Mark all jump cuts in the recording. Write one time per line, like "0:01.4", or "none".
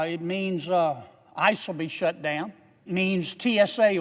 0:02.9